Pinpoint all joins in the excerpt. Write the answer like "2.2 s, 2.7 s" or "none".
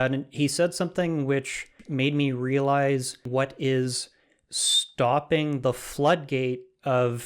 1.8 s, 3.3 s